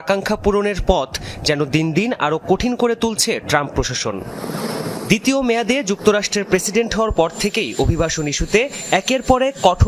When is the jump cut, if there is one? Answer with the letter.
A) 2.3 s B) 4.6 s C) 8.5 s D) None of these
B